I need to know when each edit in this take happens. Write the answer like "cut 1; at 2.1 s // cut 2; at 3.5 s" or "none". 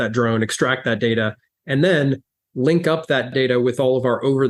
cut 1; at 3.3 s